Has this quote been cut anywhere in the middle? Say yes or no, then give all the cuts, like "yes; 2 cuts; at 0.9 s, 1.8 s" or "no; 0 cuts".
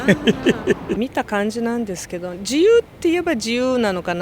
yes; 1 cut; at 1.0 s